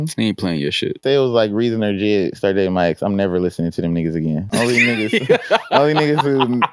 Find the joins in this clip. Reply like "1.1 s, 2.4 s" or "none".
1.0 s, 4.4 s